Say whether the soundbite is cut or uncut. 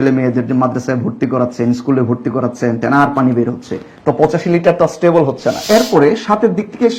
cut